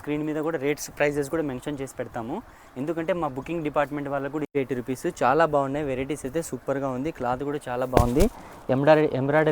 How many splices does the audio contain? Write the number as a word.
one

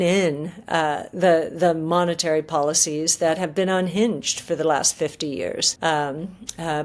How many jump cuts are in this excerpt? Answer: one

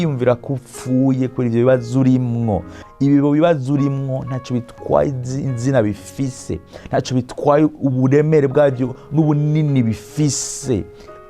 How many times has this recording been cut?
one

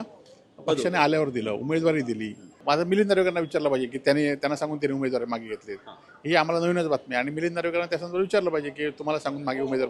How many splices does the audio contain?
one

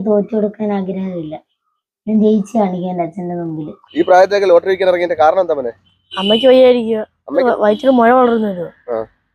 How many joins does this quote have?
two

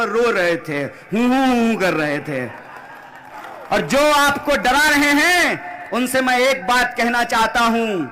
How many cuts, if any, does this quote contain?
one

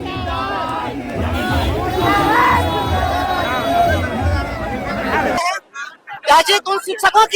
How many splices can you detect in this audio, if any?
one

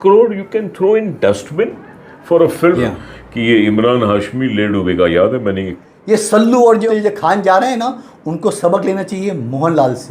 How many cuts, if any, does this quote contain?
three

